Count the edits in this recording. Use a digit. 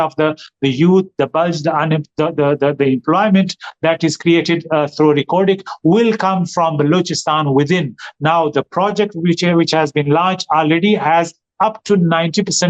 0